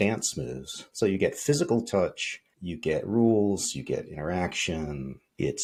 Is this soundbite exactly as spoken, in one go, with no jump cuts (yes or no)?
yes